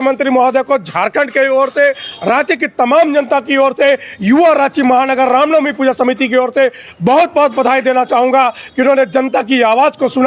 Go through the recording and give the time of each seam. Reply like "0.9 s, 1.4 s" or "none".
none